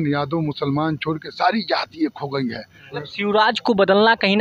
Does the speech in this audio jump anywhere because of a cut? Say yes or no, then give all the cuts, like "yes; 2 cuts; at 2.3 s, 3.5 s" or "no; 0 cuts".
yes; 1 cut; at 2.9 s